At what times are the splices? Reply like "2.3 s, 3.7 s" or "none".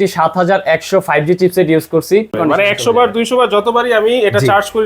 2.4 s